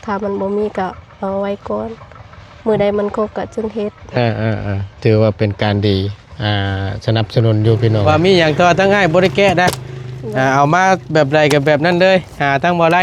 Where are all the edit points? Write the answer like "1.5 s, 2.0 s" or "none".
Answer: 8.0 s